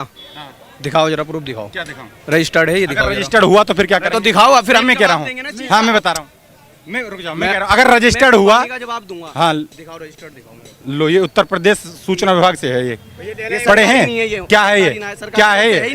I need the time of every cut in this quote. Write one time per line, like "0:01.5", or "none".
none

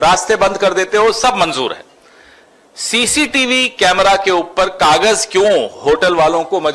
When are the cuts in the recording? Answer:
none

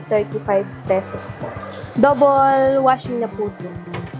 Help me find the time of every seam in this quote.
0:01.7

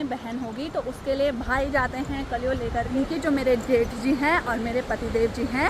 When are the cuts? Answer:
0:02.9

